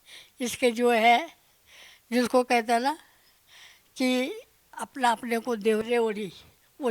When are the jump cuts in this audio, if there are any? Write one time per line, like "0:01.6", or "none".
0:04.9
0:05.8